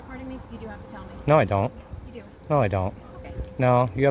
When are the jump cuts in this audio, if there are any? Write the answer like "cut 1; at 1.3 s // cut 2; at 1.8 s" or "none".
cut 1; at 1.2 s